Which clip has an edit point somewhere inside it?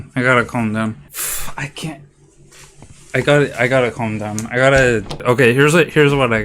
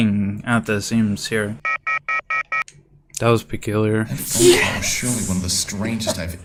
first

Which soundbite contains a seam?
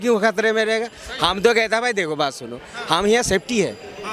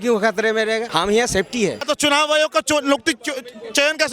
second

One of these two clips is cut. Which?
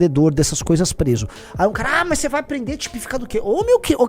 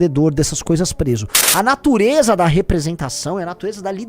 second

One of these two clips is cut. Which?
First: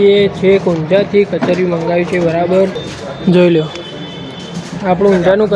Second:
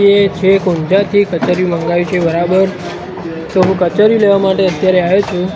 first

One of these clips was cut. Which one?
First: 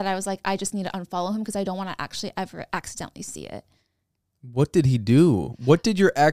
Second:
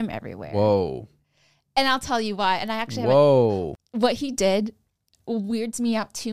second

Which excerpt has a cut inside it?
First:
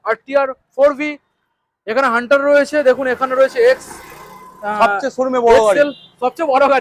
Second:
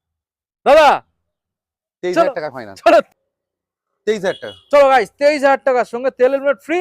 second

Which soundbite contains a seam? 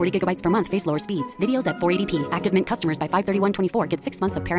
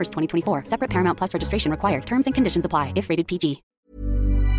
second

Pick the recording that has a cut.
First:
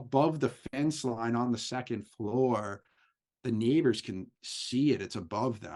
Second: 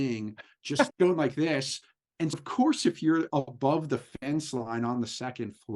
second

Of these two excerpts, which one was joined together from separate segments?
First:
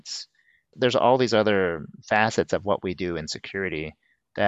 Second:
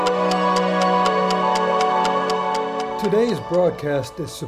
second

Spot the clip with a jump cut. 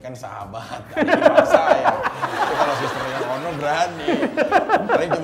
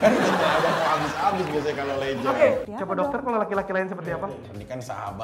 second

